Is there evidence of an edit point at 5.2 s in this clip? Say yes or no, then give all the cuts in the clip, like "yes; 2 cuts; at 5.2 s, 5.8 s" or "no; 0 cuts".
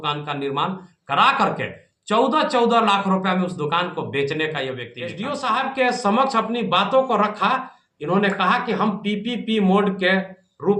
yes; 1 cut; at 5.2 s